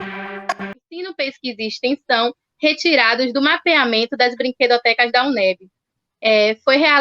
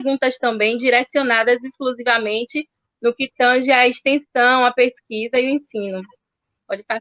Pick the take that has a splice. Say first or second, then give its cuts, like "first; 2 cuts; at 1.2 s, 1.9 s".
first; 1 cut; at 1.1 s